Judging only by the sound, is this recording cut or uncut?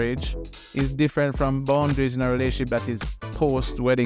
uncut